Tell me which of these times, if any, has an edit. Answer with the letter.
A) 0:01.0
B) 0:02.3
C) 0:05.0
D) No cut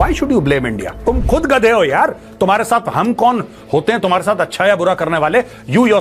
A